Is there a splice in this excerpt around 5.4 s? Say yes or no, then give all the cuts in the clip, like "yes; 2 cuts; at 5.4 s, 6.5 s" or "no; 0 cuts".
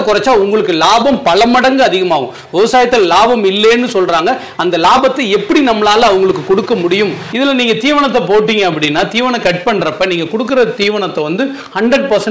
no; 1 cut; at 7.2 s